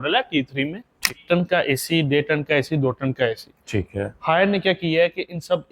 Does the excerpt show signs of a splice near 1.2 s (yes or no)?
yes